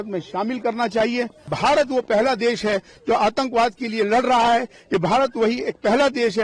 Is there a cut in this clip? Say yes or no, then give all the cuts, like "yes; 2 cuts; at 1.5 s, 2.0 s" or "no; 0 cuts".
yes; 1 cut; at 1.4 s